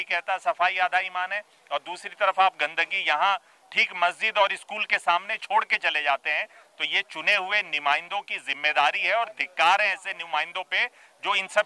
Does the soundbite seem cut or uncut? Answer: uncut